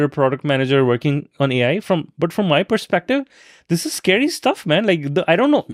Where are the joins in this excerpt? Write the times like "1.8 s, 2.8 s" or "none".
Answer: none